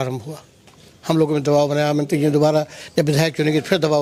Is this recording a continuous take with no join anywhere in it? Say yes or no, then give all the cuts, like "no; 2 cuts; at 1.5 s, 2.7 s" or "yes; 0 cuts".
yes; 0 cuts